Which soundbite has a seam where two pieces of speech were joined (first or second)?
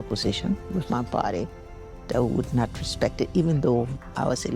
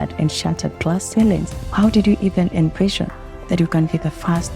second